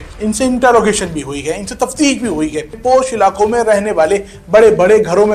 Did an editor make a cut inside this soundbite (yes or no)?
yes